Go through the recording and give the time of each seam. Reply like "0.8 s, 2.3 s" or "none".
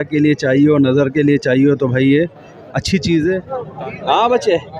3.5 s